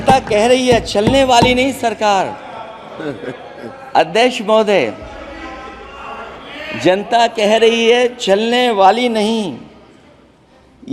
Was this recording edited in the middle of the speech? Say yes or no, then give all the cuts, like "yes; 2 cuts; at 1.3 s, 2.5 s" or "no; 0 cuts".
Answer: no; 0 cuts